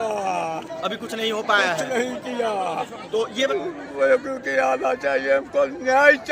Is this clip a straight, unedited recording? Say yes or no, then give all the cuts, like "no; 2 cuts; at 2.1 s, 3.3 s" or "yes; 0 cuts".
no; 1 cut; at 3.5 s